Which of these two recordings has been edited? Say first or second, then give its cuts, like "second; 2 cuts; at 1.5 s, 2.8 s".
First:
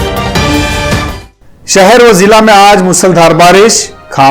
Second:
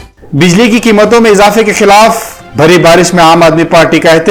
first; 1 cut; at 1.2 s